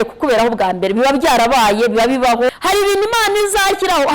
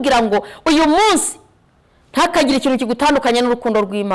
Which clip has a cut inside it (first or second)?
first